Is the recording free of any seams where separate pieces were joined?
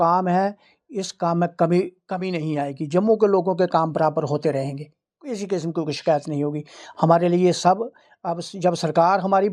yes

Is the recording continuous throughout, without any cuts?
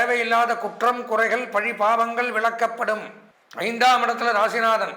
no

